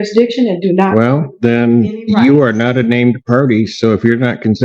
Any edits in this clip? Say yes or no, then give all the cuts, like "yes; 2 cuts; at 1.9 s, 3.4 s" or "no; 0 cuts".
yes; 1 cut; at 1.3 s